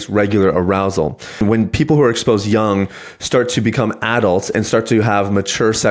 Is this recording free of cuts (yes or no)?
no